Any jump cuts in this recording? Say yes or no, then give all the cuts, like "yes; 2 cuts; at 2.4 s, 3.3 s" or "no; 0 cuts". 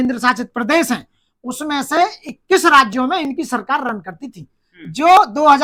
no; 0 cuts